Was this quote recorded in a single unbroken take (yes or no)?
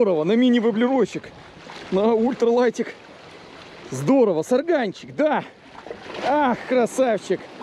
yes